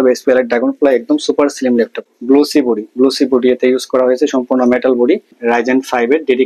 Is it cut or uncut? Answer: cut